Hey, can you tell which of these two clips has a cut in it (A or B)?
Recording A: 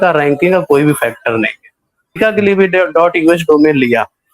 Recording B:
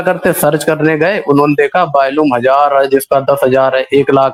A